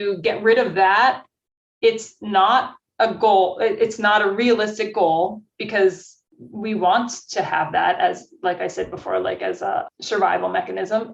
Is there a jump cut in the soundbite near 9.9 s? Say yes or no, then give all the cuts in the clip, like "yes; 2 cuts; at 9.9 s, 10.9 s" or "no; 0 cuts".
yes; 1 cut; at 9.9 s